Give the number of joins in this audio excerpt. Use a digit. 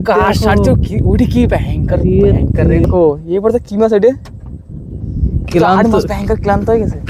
1